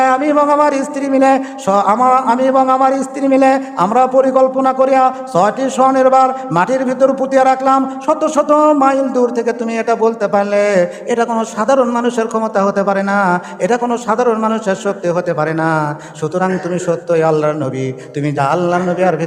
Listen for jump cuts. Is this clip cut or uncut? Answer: uncut